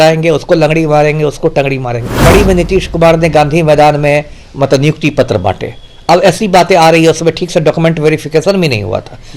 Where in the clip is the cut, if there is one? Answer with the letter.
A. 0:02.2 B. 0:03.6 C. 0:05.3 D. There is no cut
A